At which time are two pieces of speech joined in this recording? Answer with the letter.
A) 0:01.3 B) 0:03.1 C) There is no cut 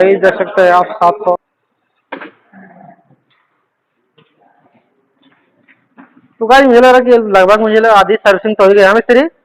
A